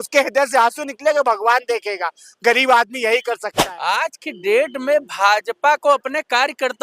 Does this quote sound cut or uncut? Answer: cut